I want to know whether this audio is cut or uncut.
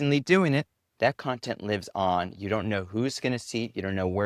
uncut